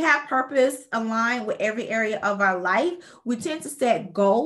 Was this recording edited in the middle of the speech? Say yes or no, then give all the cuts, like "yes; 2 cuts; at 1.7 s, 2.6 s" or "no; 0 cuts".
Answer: no; 0 cuts